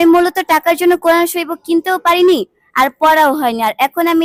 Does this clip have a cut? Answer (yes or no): no